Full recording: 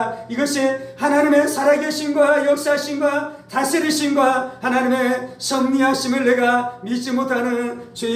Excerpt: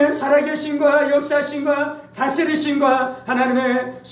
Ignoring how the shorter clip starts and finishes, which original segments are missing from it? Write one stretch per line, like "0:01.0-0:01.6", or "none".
none